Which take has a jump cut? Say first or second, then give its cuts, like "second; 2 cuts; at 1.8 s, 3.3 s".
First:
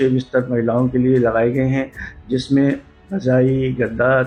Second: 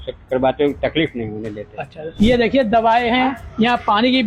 second; 1 cut; at 2.0 s